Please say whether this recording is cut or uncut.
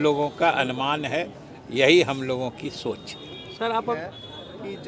cut